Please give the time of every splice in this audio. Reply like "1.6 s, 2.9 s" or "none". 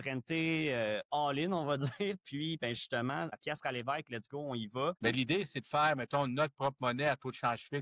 3.3 s, 5.0 s